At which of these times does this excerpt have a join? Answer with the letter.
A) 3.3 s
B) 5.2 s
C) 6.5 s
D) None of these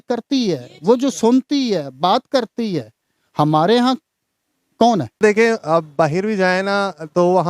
B